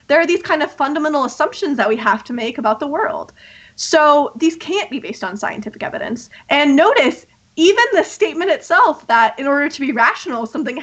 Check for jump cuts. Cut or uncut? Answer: uncut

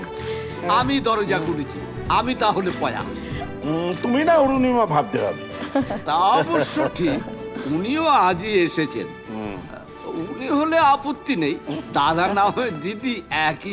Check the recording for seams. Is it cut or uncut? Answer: uncut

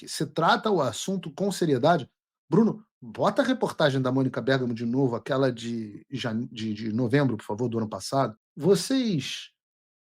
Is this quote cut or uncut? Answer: cut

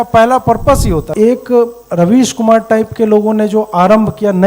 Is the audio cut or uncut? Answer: cut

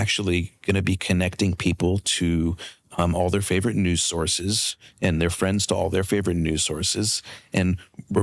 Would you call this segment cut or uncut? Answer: uncut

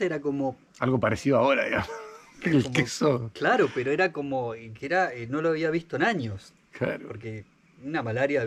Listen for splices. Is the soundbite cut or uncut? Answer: uncut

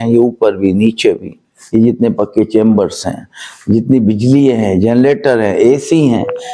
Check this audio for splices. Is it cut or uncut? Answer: uncut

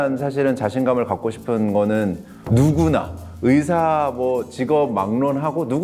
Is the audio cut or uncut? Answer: uncut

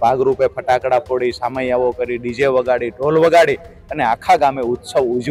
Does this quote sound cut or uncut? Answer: uncut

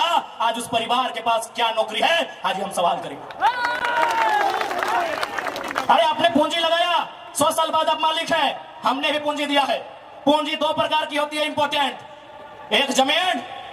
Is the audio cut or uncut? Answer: uncut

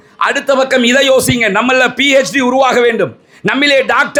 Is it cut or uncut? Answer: uncut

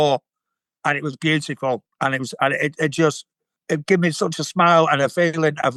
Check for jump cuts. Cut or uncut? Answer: uncut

